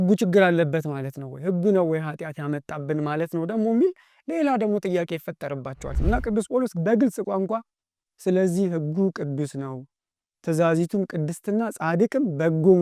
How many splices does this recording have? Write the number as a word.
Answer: one